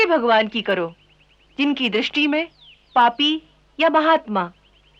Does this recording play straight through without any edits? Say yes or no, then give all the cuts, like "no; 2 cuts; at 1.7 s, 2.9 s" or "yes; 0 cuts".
yes; 0 cuts